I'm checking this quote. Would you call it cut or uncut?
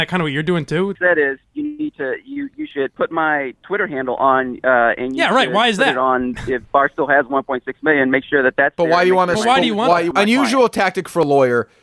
cut